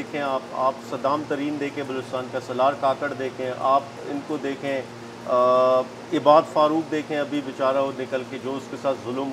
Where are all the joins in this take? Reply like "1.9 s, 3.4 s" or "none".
none